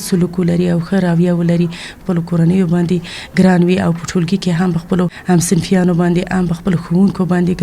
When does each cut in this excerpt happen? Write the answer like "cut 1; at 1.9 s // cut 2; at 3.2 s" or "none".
cut 1; at 2.0 s